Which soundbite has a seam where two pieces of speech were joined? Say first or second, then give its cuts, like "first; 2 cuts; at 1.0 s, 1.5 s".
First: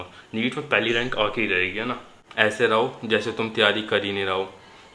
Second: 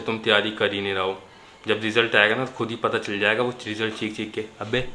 first; 1 cut; at 2.2 s